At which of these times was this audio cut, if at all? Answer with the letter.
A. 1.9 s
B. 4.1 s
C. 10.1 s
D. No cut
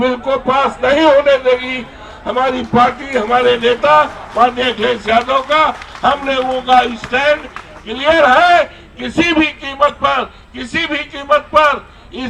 D